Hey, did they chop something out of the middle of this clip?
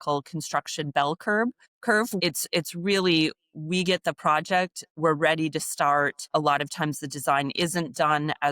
yes; 2 cuts; at 2.0 s, 6.2 s

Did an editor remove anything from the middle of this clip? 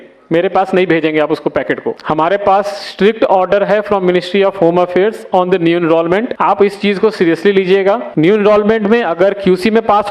yes; 3 cuts; at 2.0 s, 6.3 s, 8.1 s

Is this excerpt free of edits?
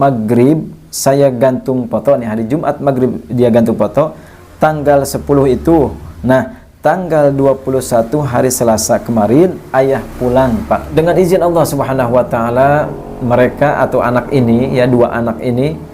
no; 1 cut; at 10.9 s

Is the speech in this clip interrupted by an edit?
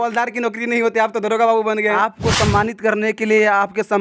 yes; 1 cut; at 1.9 s

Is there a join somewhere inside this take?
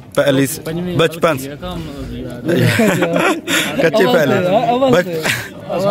no; 0 cuts

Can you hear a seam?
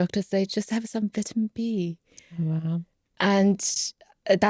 no; 0 cuts

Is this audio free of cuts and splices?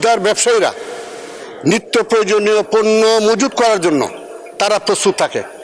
yes; 0 cuts

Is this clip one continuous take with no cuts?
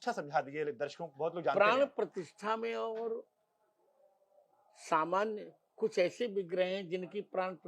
yes; 0 cuts

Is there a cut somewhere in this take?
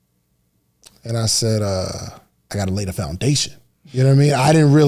yes; 1 cut; at 2.5 s

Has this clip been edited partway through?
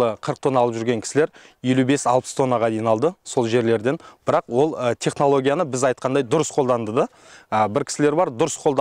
no; 0 cuts

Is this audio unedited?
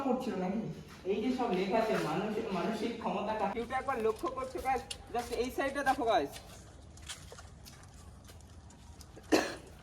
no; 1 cut; at 3.5 s

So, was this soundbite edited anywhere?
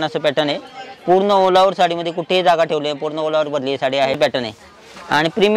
yes; 1 cut; at 4.2 s

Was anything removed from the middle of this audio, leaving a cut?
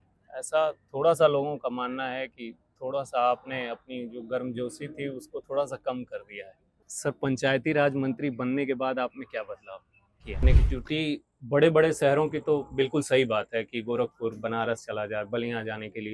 yes; 2 cuts; at 6.9 s, 10.4 s

